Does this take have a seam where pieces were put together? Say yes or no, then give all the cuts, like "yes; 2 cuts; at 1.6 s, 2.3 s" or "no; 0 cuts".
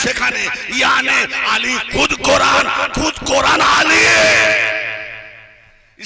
no; 0 cuts